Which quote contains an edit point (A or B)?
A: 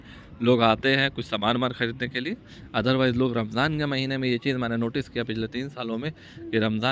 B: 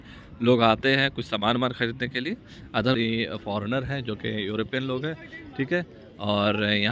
B